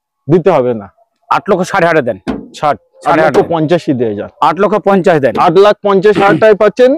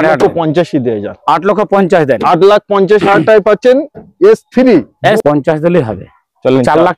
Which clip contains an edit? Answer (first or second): second